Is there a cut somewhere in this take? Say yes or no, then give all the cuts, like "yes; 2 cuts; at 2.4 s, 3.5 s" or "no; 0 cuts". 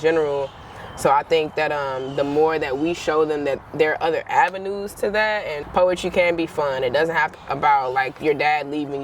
yes; 2 cuts; at 5.6 s, 7.4 s